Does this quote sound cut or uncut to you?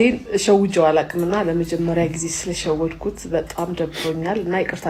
uncut